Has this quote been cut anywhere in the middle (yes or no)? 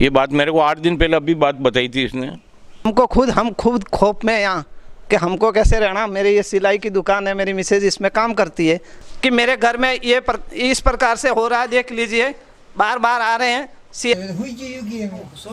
yes